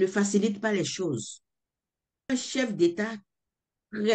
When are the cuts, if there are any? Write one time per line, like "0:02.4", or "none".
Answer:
0:02.3